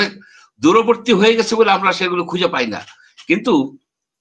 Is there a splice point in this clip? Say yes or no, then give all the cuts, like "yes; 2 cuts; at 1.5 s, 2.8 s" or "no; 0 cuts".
no; 0 cuts